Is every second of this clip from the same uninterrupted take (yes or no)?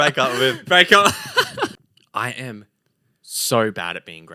no